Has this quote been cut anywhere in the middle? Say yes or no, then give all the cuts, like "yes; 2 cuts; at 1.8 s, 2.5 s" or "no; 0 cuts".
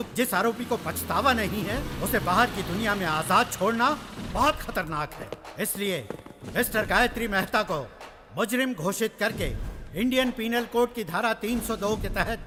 no; 0 cuts